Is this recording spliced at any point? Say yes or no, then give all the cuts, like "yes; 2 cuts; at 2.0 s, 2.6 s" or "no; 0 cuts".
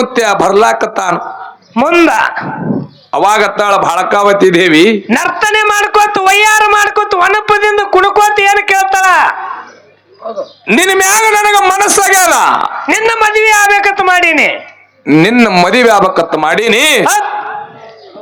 no; 0 cuts